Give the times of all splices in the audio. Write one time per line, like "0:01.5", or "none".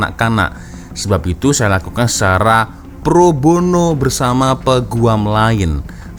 none